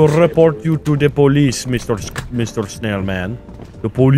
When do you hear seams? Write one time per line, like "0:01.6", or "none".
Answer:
none

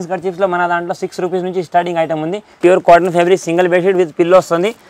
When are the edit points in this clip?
0:02.6

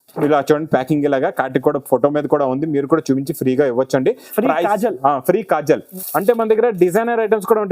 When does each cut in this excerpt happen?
0:05.9

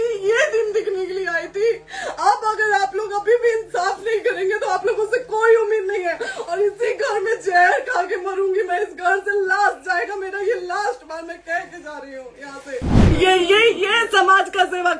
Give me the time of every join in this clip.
0:13.0

